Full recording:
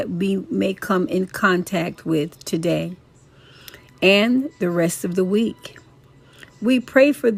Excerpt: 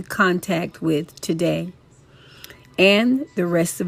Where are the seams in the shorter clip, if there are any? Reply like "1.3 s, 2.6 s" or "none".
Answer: none